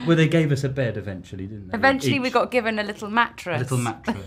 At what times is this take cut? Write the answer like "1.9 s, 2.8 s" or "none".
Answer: none